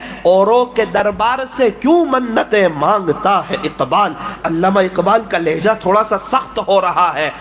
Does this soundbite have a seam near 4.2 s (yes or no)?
no